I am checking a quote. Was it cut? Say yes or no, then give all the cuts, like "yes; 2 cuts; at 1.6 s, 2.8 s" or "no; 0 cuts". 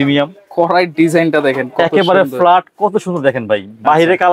no; 0 cuts